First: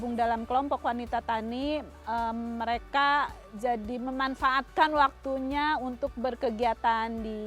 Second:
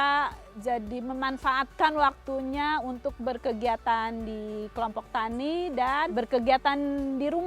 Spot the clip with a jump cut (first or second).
second